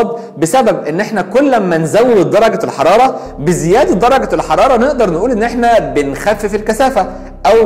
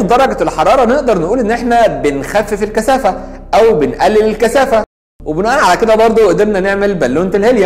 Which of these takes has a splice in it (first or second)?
second